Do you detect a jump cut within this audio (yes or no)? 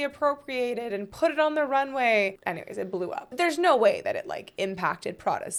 no